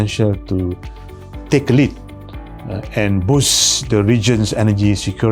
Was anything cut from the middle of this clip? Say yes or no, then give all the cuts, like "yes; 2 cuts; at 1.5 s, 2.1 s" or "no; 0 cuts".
no; 0 cuts